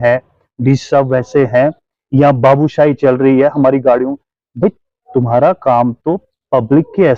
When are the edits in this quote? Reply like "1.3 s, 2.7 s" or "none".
none